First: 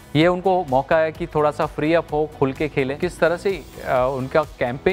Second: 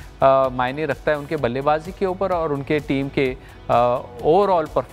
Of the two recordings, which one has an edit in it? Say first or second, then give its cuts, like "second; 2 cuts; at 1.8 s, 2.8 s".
first; 1 cut; at 2.9 s